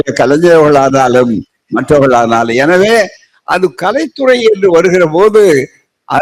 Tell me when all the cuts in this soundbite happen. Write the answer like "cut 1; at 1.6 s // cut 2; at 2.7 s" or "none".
none